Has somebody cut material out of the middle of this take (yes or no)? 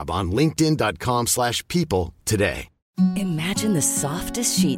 yes